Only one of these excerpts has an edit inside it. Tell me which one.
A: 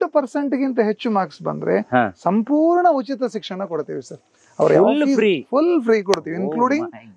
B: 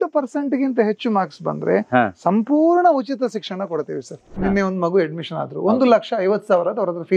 B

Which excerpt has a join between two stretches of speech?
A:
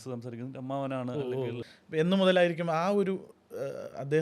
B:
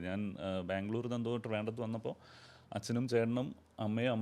A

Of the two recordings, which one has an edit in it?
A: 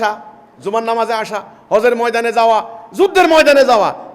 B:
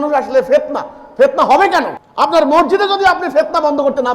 B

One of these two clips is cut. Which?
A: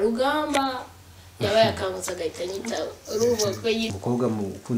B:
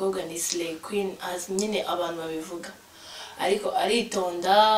A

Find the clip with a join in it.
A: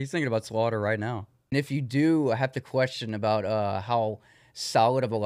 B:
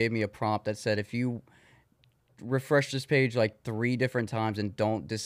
A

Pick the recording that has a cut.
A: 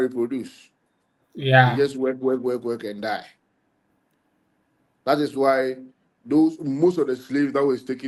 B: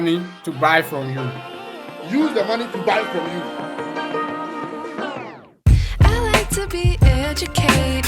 B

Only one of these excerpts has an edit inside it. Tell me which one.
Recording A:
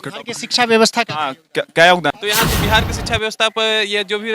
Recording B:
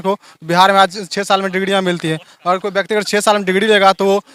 A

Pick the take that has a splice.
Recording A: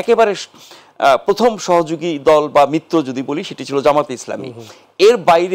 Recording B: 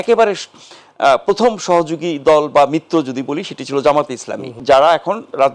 B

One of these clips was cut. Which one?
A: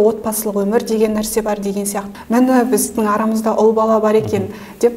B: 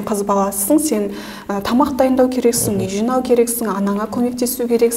A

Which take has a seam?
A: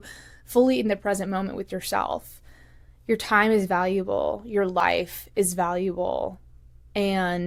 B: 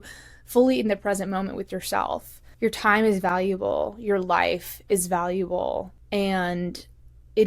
B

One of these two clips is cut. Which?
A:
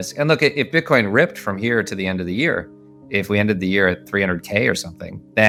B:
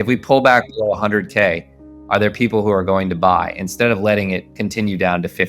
B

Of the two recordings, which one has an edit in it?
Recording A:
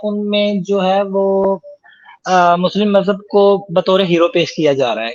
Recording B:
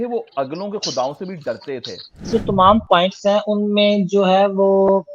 B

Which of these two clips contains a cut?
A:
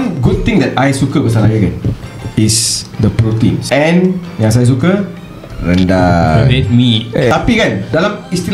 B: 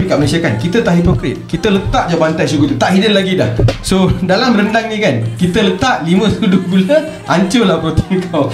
A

